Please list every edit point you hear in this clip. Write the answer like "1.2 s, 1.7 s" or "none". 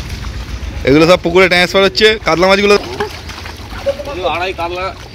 2.8 s

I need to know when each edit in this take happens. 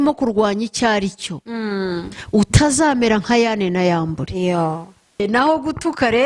5.2 s

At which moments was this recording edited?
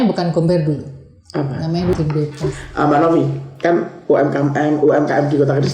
1.9 s

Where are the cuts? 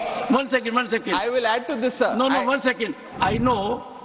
3.0 s

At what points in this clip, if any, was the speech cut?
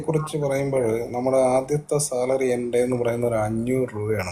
none

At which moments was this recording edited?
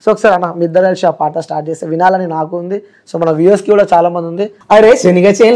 4.5 s

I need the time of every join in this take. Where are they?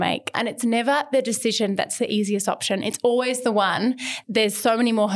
4.2 s

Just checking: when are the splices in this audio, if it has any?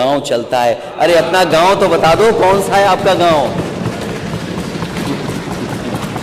none

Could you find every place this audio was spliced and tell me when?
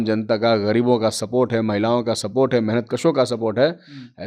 none

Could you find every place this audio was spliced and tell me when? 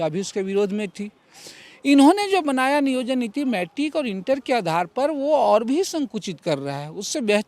none

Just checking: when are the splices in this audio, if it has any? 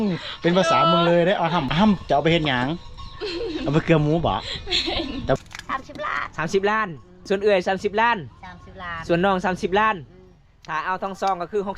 1.7 s, 5.4 s, 7.1 s

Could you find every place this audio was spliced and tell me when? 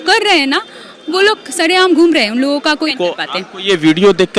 2.9 s

